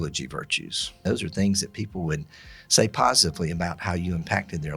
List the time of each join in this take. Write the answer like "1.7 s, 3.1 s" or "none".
1.0 s